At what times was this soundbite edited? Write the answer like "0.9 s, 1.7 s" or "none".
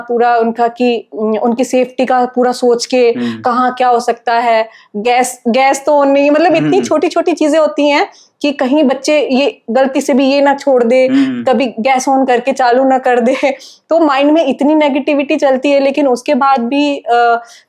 none